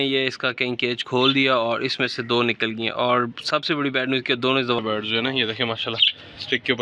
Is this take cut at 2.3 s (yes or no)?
no